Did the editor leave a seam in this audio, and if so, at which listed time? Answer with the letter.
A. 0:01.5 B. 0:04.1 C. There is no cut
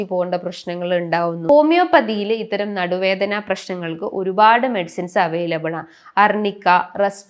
A